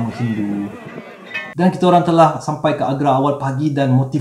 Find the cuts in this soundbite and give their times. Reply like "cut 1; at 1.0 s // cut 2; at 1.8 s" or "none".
cut 1; at 1.1 s